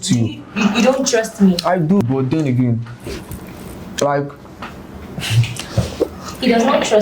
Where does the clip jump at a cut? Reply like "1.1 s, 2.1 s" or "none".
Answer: 2.0 s